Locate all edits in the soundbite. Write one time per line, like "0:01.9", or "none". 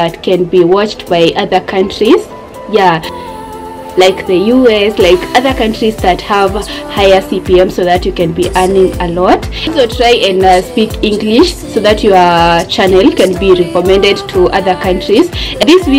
none